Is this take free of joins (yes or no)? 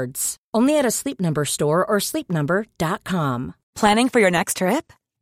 no